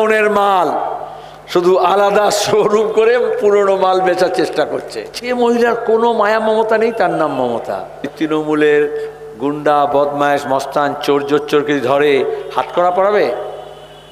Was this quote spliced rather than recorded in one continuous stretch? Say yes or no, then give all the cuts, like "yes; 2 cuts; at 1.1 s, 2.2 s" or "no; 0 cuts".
yes; 2 cuts; at 5.2 s, 8.1 s